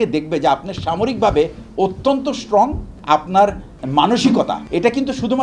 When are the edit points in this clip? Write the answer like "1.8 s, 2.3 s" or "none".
2.9 s, 3.8 s, 4.6 s